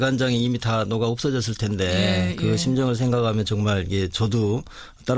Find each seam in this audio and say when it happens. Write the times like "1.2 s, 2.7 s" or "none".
1.1 s